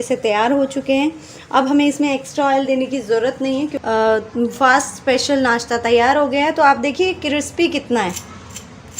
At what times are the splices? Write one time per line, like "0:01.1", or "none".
0:03.7